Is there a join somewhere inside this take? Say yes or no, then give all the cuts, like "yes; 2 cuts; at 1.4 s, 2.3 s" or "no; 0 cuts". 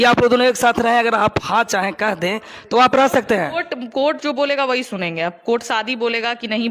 no; 0 cuts